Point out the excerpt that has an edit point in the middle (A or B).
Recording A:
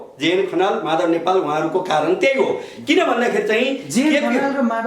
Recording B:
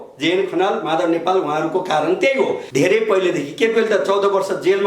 B